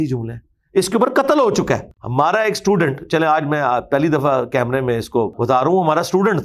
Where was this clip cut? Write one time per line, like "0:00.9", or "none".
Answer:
0:02.0
0:05.4

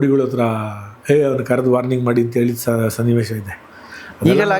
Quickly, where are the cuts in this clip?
none

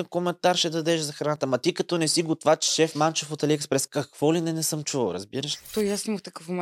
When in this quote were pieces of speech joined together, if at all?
0:02.7
0:05.7

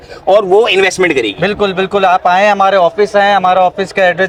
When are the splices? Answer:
none

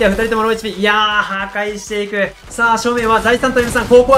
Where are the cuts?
0:02.5

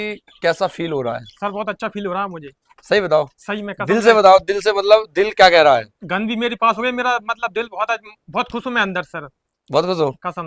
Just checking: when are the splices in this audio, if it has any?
none

